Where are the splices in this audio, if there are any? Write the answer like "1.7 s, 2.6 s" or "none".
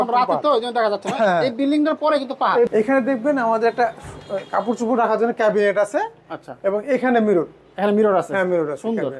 2.7 s